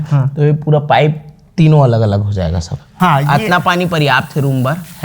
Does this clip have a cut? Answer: yes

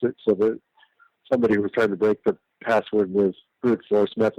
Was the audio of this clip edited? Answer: no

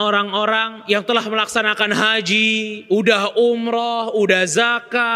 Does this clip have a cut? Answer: no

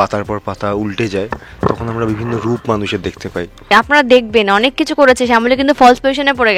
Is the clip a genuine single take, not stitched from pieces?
no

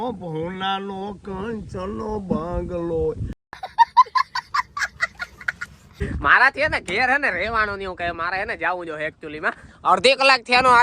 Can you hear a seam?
yes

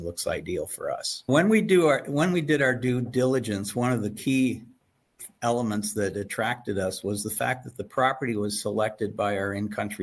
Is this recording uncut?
no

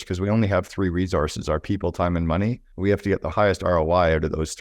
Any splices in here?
yes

